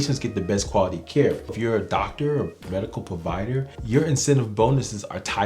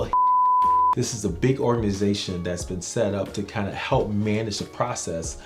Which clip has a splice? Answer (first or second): first